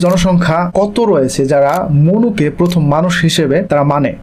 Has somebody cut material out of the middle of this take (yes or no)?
no